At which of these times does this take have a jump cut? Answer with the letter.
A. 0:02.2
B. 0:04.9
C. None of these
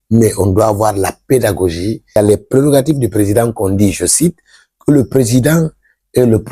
A